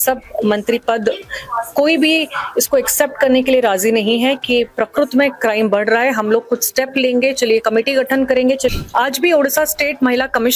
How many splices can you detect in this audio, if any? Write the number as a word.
one